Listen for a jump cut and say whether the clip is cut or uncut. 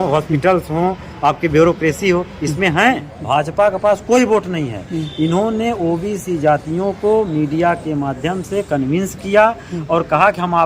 cut